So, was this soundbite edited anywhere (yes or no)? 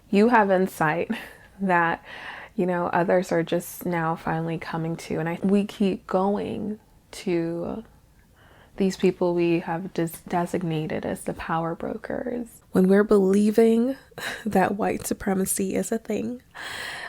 yes